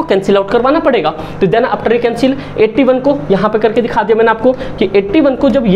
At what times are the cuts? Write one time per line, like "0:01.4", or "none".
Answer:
none